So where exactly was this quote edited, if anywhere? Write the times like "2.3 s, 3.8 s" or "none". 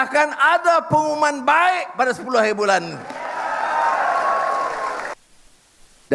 5.1 s